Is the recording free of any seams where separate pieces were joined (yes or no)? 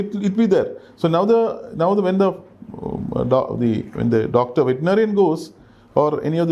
yes